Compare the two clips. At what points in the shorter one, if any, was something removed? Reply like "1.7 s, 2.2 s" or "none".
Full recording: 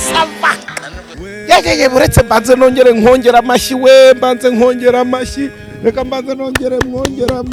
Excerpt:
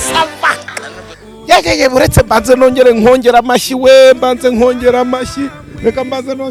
none